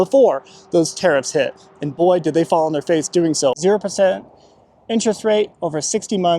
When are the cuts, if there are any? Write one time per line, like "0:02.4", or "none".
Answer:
0:03.6